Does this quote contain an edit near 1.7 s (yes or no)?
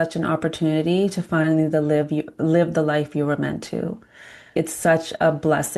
no